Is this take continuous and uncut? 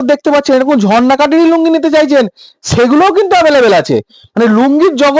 yes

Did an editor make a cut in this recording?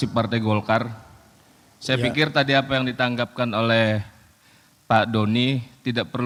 no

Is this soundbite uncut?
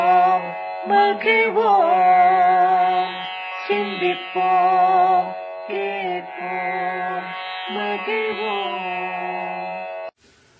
no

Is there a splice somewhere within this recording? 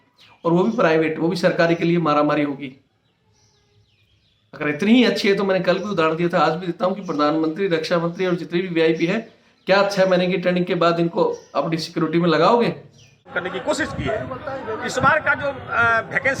yes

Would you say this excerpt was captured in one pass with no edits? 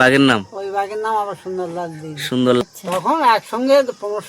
no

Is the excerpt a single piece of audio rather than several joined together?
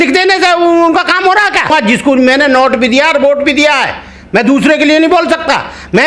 no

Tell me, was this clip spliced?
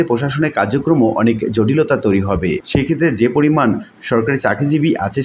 yes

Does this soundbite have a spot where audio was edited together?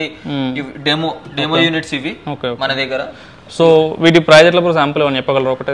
no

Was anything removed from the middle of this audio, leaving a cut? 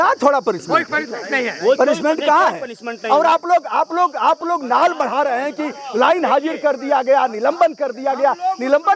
no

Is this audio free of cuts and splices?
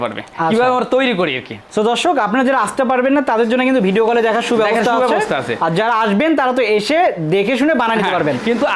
yes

